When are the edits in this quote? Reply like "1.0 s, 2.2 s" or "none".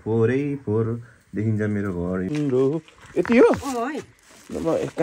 2.3 s